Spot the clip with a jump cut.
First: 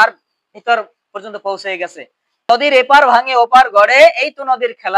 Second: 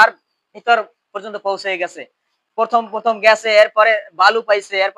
first; 1 cut; at 2.5 s

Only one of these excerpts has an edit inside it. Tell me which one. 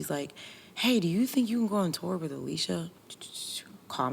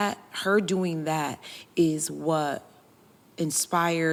first; 1 cut; at 3.0 s

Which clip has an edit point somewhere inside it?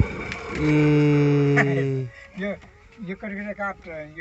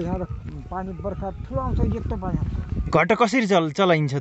second; 1 cut; at 2.8 s

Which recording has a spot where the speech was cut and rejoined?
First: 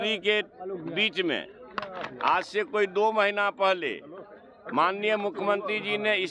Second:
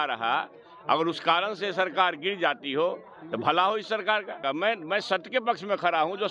second; 1 cut; at 4.4 s

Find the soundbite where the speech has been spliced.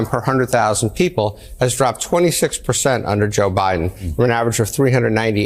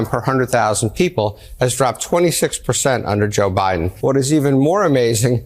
second; 1 cut; at 3.9 s

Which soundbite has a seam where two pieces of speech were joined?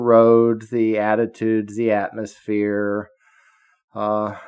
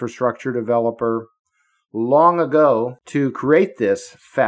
second; 1 cut; at 3.0 s

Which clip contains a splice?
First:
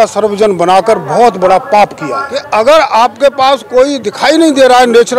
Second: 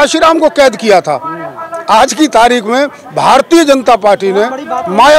first; 1 cut; at 2.3 s

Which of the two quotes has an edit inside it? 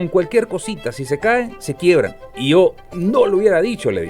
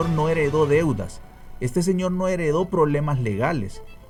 first; 1 cut; at 2.2 s

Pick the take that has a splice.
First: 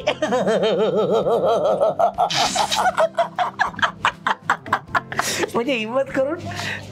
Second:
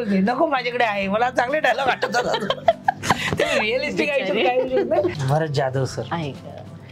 second; 1 cut; at 5.1 s

